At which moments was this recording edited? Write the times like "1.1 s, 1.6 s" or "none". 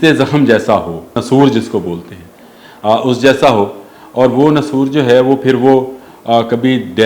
1.2 s

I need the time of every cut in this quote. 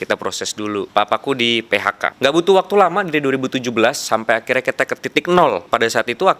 0.9 s, 2.1 s, 5.6 s

